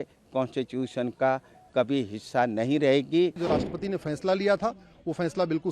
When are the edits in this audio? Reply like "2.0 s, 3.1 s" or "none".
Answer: 3.4 s